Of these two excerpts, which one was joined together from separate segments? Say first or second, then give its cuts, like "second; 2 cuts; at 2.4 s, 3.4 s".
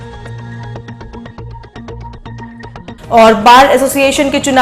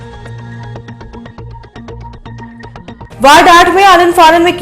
second; 1 cut; at 2.9 s